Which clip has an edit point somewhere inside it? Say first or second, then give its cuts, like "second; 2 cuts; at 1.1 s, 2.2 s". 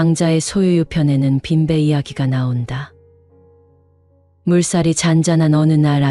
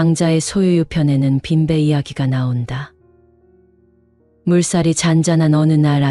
second; 2 cuts; at 2.9 s, 4.4 s